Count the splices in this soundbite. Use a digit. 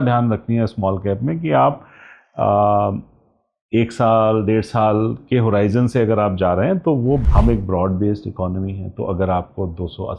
1